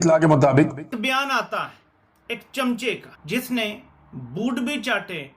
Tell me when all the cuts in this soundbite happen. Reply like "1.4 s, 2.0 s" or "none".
1.0 s